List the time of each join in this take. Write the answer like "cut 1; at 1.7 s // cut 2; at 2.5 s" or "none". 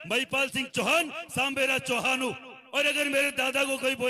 cut 1; at 2.5 s